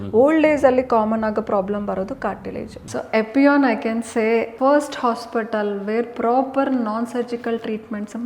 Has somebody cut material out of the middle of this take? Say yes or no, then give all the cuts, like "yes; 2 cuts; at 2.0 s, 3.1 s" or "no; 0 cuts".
yes; 2 cuts; at 2.8 s, 4.5 s